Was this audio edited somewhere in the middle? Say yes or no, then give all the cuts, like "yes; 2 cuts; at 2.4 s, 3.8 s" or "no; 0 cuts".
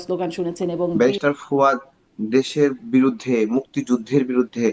yes; 1 cut; at 0.9 s